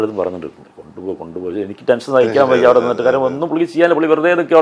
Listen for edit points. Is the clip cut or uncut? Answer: uncut